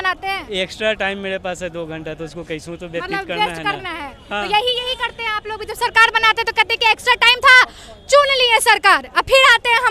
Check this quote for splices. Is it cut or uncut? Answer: uncut